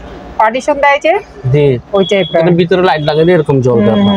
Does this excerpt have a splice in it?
no; 0 cuts

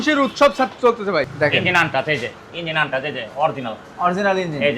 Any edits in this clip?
yes; 1 cut; at 1.3 s

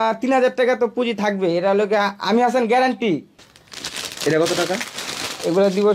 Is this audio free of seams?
no; 1 cut; at 3.4 s

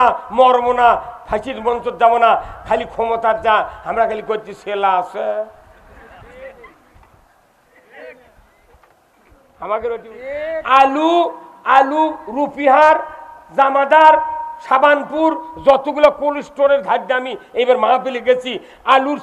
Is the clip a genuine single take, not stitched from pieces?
no; 1 cut; at 10.1 s

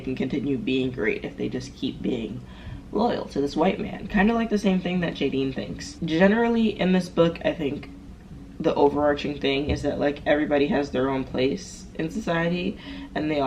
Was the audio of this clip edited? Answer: no; 0 cuts

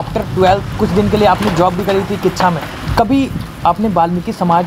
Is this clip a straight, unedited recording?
no; 1 cut; at 2.8 s

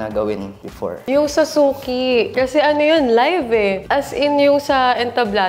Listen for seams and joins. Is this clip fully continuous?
no; 3 cuts; at 0.9 s, 2.3 s, 3.8 s

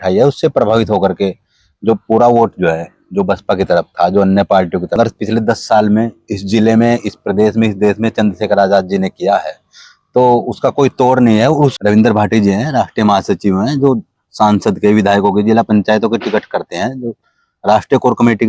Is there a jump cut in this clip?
yes; 2 cuts; at 5.0 s, 11.7 s

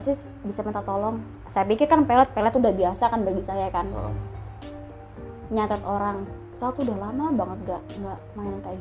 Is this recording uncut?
yes; 0 cuts

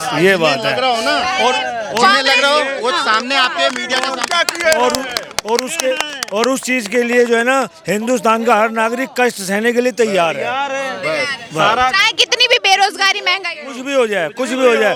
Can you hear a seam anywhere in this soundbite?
no; 0 cuts

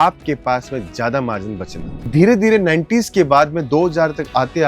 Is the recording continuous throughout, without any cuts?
no; 1 cut; at 2.1 s

